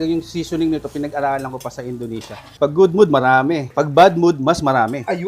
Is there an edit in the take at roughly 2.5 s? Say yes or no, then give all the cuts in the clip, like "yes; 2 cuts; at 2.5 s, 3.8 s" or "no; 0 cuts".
yes; 1 cut; at 2.5 s